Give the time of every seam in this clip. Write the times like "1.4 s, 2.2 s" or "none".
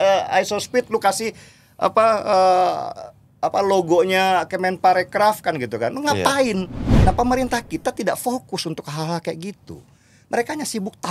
6.9 s